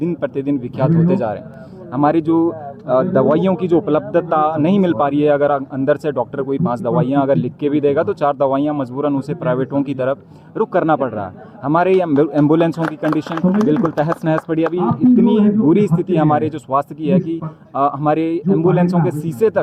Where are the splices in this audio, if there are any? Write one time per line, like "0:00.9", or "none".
none

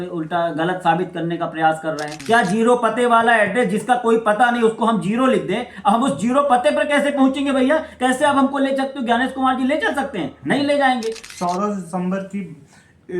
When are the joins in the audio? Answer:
0:02.1
0:11.2

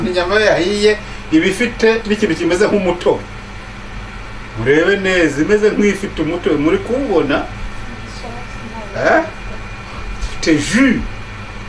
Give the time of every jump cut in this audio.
none

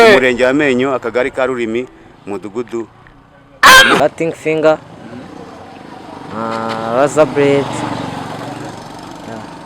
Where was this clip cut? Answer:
0:04.0

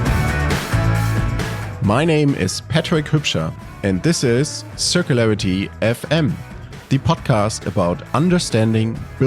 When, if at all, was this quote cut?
0:01.1

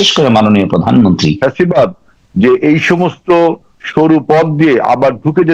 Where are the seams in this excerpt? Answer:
0:01.4

